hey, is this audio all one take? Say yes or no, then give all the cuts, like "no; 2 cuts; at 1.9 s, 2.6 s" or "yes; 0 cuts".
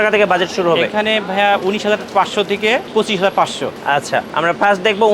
no; 2 cuts; at 2.9 s, 3.9 s